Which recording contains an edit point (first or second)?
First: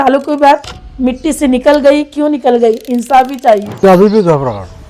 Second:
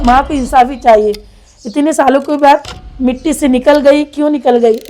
first